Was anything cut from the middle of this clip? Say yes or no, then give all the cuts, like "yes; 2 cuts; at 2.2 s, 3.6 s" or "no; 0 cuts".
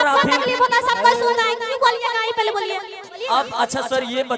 yes; 1 cut; at 3.2 s